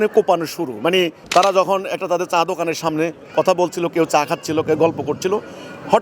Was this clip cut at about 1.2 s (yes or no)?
yes